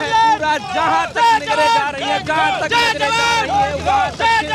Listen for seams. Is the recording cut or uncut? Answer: uncut